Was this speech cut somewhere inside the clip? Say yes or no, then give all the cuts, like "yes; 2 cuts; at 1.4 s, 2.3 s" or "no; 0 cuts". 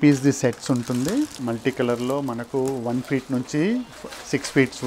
yes; 1 cut; at 1.4 s